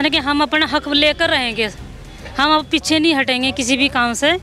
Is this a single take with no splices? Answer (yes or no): yes